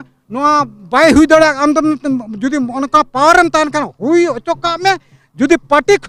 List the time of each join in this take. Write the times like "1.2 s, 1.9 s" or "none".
none